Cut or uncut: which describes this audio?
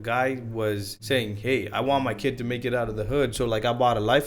cut